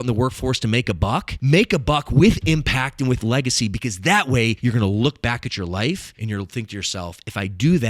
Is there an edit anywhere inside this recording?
yes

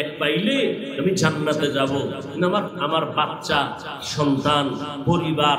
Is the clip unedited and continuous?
yes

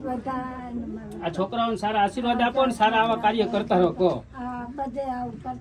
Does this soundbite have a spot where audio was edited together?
no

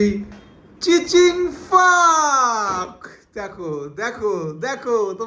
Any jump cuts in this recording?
no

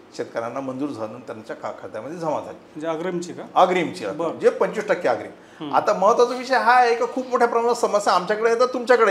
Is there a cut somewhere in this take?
no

